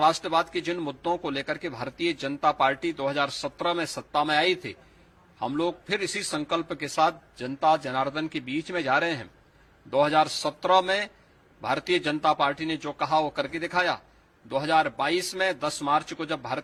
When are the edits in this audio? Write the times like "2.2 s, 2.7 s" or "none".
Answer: none

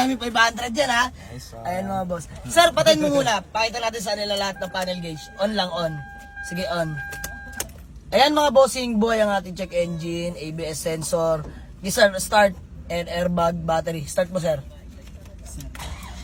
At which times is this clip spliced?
none

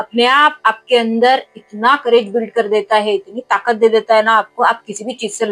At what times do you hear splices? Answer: none

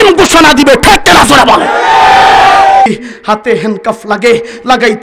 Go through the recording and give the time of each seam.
2.9 s

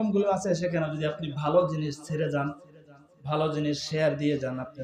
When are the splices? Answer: none

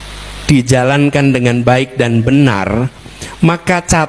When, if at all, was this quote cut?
none

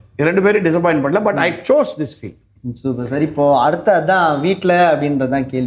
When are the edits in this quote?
none

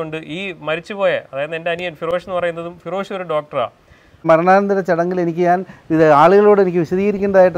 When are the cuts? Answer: 4.2 s

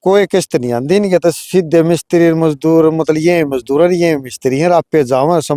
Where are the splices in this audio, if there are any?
none

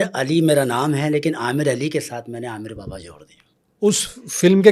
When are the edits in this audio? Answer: none

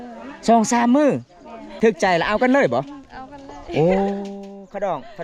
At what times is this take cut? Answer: 1.6 s

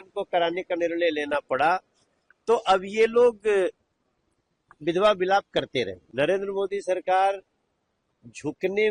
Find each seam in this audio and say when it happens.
6.0 s

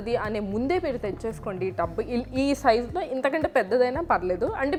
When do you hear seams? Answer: none

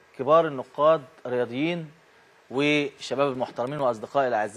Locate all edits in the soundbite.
2.4 s

